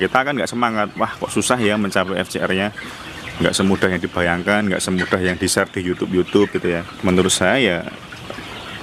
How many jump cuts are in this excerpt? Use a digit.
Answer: 1